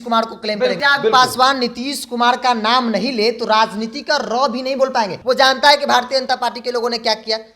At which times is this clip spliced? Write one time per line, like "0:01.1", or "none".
0:00.8
0:05.1